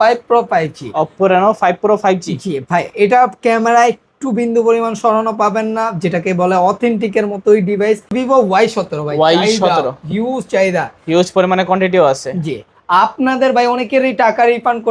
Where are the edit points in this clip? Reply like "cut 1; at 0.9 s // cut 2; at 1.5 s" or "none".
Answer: cut 1; at 8.1 s